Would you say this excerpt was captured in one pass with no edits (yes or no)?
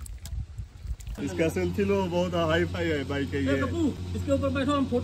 no